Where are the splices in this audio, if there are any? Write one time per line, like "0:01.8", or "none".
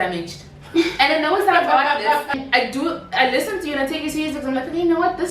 0:02.3